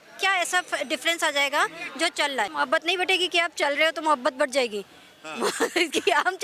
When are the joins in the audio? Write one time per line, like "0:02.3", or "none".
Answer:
0:02.5